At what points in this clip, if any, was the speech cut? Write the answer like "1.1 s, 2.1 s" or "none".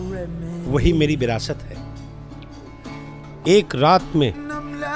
3.3 s